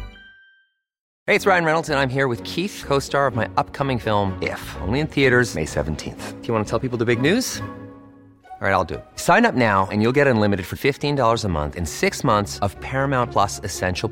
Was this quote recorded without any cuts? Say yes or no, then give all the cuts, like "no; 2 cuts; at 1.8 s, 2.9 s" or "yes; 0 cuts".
no; 1 cut; at 1.1 s